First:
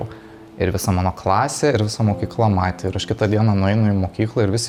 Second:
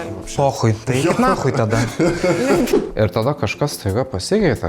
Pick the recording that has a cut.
second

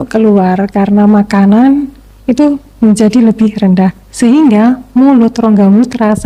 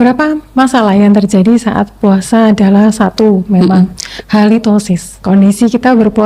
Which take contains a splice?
second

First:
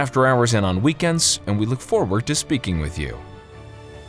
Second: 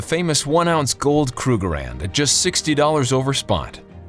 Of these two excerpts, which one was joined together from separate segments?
first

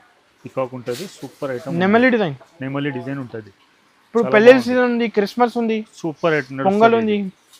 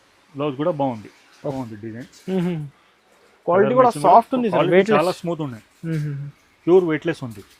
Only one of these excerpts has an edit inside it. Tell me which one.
second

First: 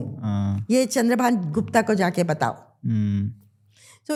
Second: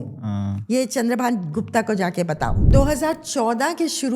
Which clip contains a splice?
second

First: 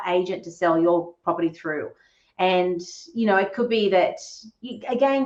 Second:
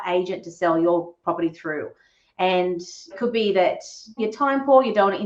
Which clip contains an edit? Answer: second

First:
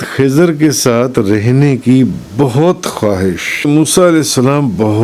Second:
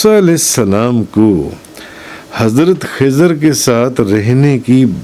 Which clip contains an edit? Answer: first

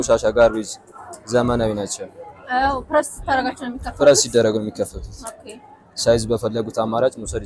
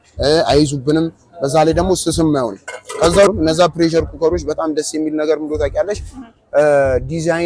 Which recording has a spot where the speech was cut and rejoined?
second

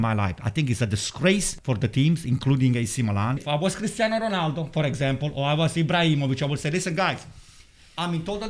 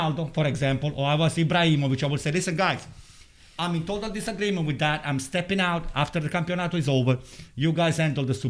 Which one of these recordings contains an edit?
first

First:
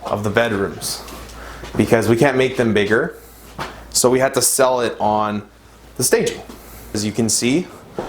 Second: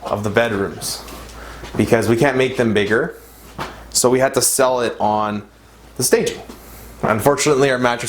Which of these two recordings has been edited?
first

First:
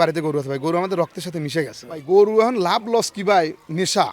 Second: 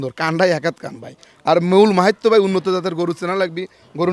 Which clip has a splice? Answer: first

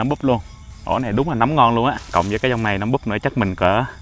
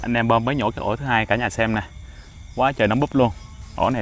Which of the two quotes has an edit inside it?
first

